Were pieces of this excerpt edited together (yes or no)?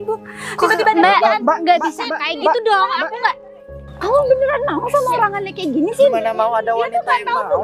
yes